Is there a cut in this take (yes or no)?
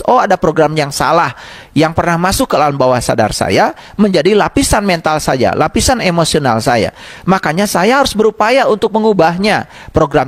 no